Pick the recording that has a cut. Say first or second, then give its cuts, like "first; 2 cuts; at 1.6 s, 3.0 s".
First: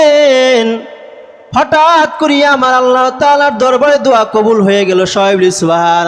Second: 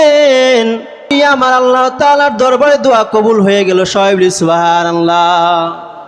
second; 1 cut; at 1.1 s